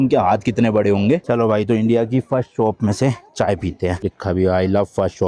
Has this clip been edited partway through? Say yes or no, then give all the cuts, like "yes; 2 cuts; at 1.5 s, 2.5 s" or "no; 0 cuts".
yes; 2 cuts; at 1.3 s, 4.1 s